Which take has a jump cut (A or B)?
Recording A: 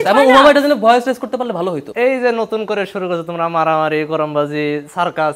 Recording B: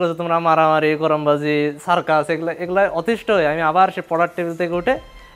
A